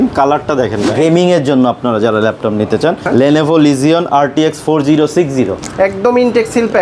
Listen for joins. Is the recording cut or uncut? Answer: cut